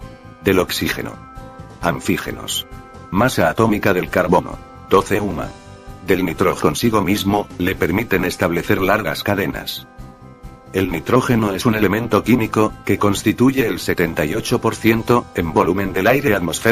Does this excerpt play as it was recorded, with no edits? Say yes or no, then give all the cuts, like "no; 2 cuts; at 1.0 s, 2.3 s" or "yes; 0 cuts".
yes; 0 cuts